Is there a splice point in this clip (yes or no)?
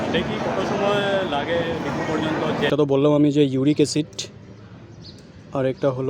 yes